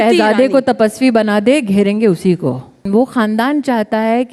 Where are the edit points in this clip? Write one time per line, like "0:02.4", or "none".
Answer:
0:02.8